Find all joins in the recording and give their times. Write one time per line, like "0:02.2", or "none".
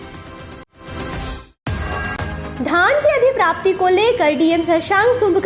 0:02.5